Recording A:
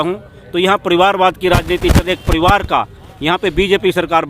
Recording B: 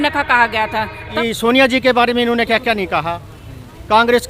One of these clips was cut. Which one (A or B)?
B